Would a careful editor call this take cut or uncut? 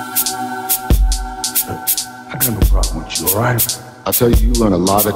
uncut